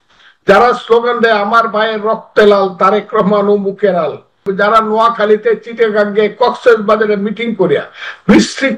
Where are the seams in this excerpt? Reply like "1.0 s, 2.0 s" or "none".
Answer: 4.4 s